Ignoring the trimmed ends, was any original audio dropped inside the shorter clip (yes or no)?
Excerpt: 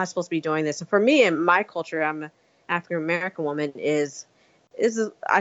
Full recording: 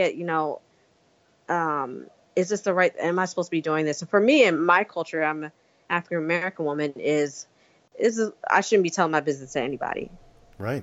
no